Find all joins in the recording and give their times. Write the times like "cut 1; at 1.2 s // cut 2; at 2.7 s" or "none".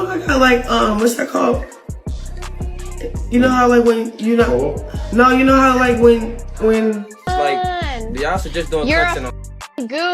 cut 1; at 7.1 s